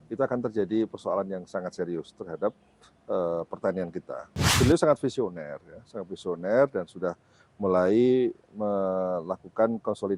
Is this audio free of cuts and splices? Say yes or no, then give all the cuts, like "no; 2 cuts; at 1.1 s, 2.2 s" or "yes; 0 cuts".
no; 1 cut; at 4.5 s